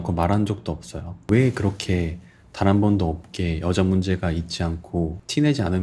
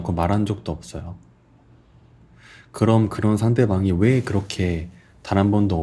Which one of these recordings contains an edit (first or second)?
first